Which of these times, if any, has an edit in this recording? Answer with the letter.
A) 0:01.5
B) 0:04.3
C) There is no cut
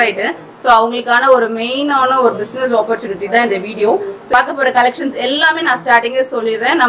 B